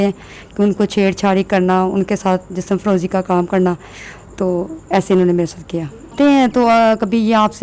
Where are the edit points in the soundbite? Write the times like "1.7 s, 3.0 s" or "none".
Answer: 6.1 s